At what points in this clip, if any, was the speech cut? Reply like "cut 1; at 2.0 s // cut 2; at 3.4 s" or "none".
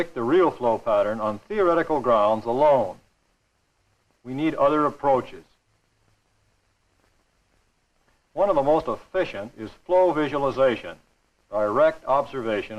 cut 1; at 4.6 s